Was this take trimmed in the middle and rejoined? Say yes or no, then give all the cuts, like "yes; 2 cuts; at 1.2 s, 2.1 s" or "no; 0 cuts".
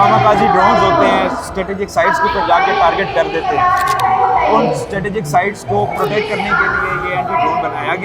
no; 0 cuts